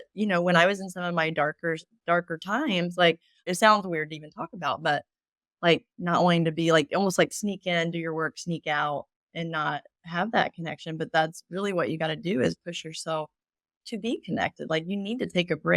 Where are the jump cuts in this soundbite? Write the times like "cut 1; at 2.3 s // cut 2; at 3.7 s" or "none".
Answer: cut 1; at 3.5 s